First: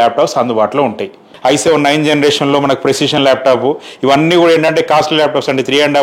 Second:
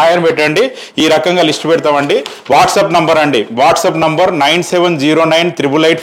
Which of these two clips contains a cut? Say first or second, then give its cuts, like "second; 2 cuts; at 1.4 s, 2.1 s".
first; 1 cut; at 1.3 s